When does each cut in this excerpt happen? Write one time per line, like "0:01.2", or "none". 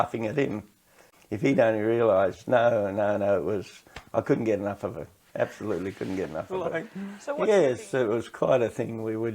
0:01.1
0:06.8